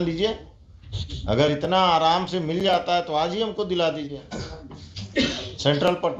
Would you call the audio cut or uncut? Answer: uncut